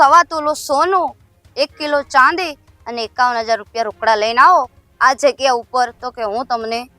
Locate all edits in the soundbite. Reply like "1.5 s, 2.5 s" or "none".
none